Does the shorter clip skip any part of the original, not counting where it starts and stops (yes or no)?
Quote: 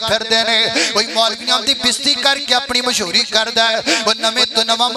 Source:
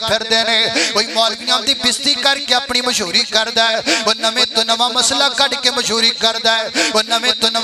no